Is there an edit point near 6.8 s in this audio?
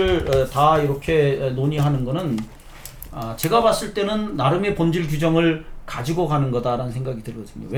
no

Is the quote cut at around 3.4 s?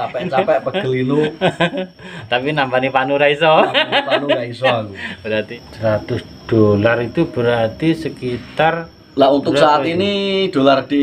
no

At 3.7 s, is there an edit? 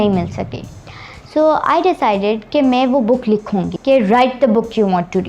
yes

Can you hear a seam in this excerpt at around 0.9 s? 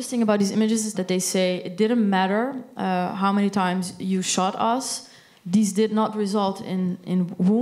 yes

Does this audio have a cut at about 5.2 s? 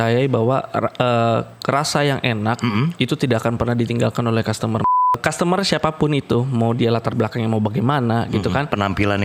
yes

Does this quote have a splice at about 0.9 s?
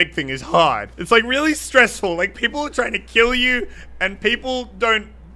yes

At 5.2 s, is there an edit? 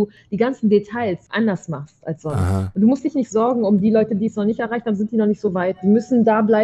no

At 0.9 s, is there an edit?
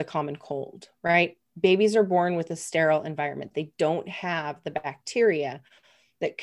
no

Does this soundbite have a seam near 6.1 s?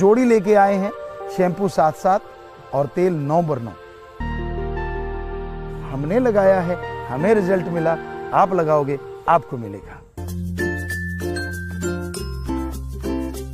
no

